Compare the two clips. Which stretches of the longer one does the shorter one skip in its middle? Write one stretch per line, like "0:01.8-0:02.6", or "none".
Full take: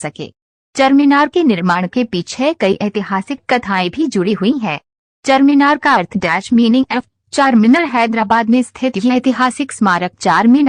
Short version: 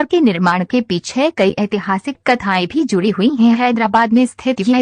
0:05.0-0:08.1